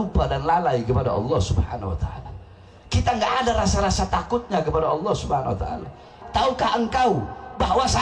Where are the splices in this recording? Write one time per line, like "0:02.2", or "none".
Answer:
0:06.2